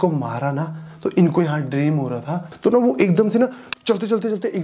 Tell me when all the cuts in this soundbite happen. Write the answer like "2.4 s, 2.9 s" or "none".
2.4 s